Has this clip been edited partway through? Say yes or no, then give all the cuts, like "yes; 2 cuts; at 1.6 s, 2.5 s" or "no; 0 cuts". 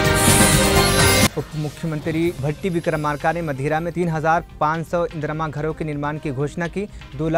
no; 0 cuts